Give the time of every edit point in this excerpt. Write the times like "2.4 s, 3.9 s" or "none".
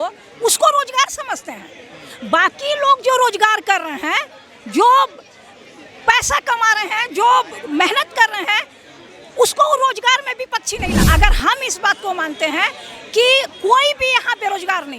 11.0 s